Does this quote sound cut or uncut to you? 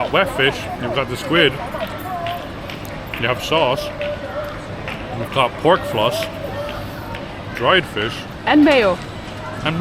uncut